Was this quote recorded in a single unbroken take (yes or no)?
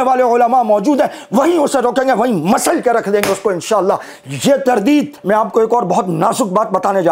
no